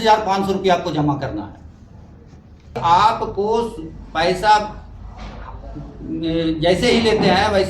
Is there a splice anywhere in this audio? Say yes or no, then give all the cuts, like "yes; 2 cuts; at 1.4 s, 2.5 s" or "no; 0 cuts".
yes; 1 cut; at 2.7 s